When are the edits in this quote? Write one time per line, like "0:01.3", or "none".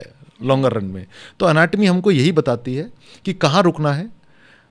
none